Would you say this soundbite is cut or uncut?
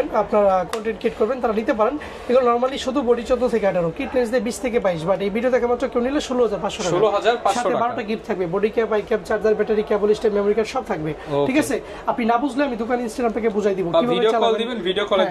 uncut